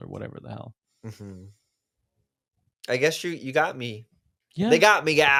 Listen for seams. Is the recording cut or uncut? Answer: uncut